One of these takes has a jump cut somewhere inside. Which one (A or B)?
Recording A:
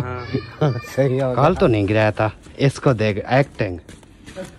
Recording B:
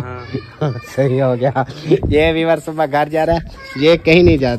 A